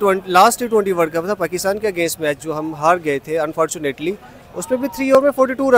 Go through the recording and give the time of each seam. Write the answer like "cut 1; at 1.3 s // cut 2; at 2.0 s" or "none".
none